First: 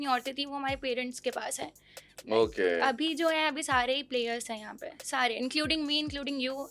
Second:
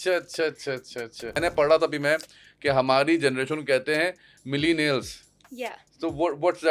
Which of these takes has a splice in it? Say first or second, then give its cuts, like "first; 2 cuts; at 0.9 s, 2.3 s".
second; 1 cut; at 1.3 s